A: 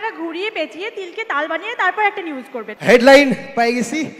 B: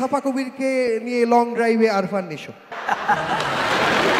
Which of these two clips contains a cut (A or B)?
A